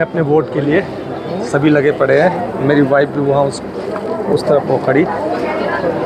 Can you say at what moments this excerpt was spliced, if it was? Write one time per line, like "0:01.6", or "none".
none